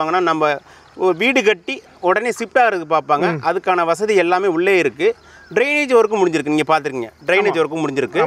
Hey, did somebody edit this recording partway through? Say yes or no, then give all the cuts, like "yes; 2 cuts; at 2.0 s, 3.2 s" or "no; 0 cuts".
no; 0 cuts